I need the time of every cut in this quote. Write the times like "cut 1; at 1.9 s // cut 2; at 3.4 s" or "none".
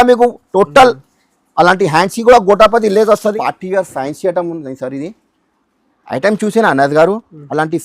cut 1; at 3.4 s